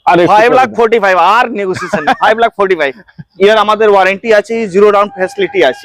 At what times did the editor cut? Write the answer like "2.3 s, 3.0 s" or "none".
3.2 s

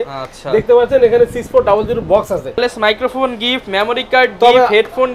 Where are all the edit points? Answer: 2.6 s

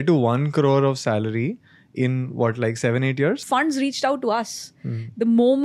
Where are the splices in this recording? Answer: 3.4 s

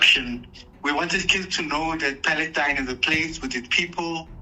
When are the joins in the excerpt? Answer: none

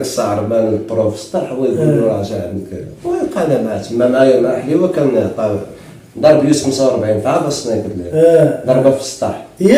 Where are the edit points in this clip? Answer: none

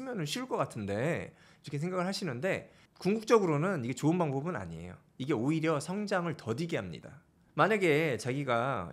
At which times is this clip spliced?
none

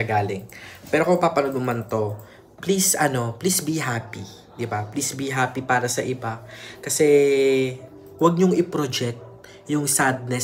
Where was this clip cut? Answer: none

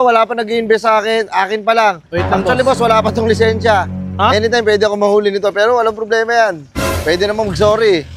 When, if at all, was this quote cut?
none

